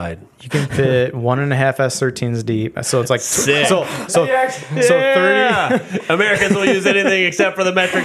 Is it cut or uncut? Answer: uncut